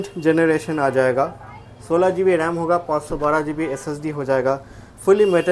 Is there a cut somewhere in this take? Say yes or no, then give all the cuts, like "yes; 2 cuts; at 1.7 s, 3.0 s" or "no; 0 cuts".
no; 0 cuts